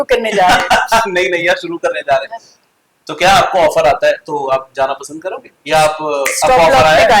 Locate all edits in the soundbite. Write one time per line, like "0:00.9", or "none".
none